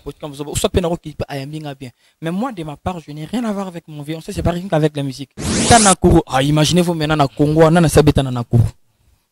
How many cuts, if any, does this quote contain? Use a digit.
1